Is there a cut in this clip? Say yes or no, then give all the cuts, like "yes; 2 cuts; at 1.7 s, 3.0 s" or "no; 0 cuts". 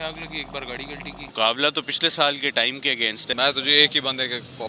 yes; 2 cuts; at 1.3 s, 3.3 s